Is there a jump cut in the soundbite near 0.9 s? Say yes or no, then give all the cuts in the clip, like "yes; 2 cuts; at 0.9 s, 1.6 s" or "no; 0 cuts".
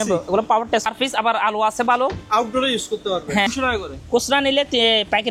yes; 2 cuts; at 0.9 s, 3.5 s